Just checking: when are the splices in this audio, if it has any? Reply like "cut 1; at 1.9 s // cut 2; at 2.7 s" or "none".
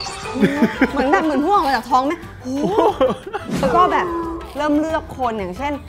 cut 1; at 3.6 s